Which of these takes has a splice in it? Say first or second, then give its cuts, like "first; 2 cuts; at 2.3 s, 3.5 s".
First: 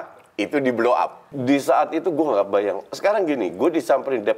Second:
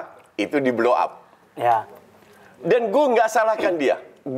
first; 1 cut; at 1.3 s